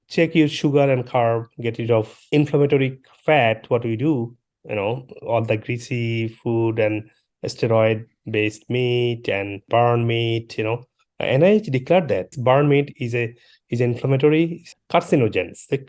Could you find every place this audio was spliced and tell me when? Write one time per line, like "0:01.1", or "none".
none